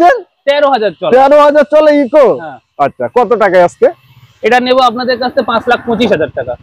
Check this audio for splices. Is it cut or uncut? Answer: uncut